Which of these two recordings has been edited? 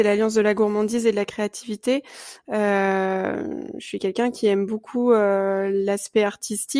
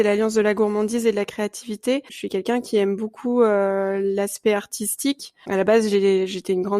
second; 2 cuts; at 2.2 s, 5.4 s

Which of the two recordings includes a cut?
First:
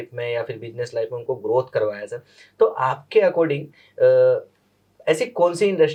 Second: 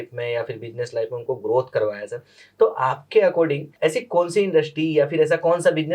second; 1 cut; at 3.6 s

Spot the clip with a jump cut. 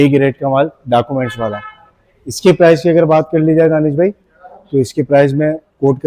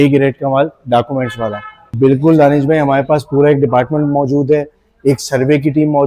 second; 1 cut; at 1.9 s

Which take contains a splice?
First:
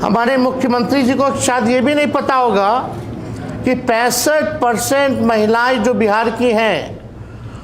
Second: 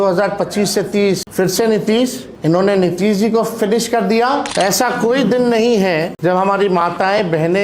second; 4 cuts; at 1.3 s, 2.3 s, 4.5 s, 6.1 s

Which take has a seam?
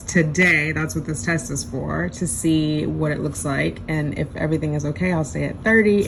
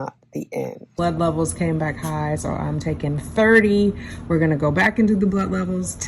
second; 1 cut; at 0.9 s

